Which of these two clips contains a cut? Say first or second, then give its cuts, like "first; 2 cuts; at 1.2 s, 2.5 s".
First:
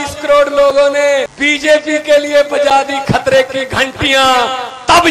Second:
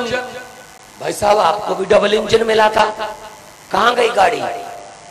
first; 1 cut; at 1.3 s